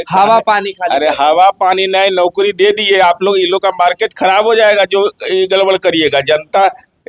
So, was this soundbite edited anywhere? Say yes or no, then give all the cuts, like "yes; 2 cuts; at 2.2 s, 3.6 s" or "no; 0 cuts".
no; 0 cuts